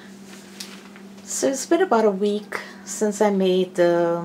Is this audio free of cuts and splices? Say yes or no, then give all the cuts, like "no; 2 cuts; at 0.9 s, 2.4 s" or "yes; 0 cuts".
yes; 0 cuts